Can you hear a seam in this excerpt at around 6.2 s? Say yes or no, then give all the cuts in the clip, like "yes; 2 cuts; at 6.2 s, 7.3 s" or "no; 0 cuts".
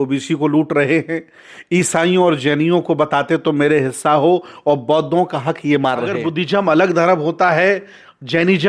yes; 1 cut; at 6.2 s